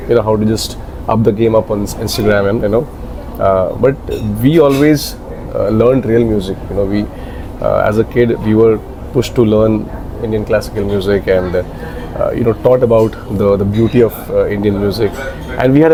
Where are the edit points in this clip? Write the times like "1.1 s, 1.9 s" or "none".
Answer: none